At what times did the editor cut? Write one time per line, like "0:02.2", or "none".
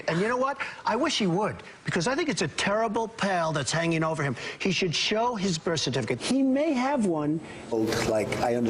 none